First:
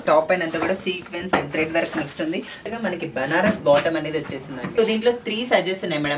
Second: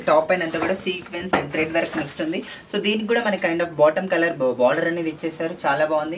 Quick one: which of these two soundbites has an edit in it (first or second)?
first